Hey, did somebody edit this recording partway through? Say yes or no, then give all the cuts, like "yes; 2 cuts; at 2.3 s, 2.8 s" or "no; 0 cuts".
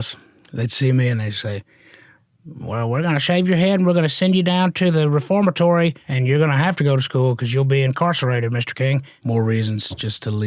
yes; 2 cuts; at 6.1 s, 9.1 s